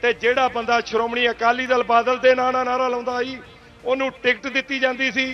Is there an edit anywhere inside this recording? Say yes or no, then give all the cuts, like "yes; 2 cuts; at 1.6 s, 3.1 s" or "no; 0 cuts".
no; 0 cuts